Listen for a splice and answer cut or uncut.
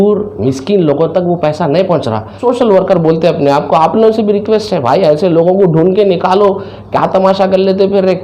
cut